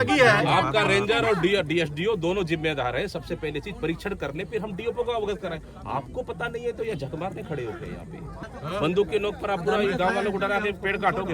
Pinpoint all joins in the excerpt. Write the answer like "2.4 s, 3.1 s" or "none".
8.4 s